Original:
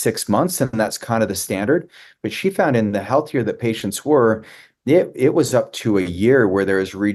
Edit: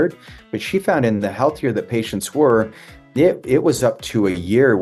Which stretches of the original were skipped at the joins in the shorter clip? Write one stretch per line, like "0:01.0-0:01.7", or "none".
none